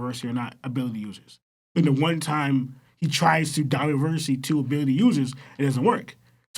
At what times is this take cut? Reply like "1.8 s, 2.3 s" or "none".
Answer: none